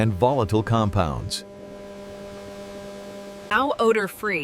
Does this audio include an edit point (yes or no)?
no